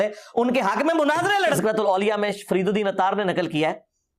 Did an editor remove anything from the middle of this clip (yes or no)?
yes